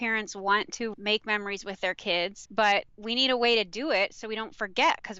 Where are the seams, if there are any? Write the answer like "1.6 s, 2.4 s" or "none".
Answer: 0.9 s, 2.4 s, 3.0 s